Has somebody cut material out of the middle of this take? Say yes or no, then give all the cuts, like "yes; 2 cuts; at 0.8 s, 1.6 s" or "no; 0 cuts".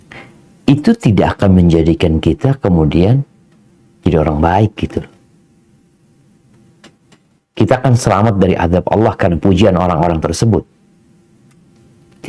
no; 0 cuts